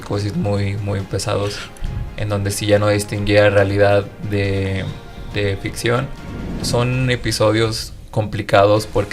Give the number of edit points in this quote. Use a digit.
1